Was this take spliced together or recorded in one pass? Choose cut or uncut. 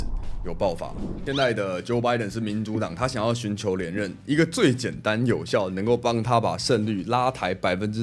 cut